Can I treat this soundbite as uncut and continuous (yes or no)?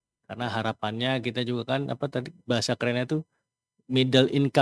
yes